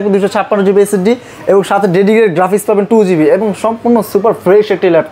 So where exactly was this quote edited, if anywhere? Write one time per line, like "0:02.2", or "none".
none